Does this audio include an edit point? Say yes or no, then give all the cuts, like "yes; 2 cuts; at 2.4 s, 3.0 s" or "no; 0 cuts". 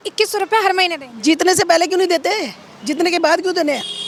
no; 0 cuts